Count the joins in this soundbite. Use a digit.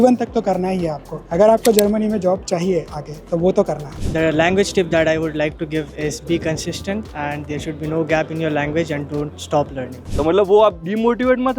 2